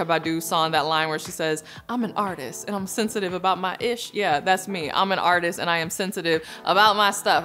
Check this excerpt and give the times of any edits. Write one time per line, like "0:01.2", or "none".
none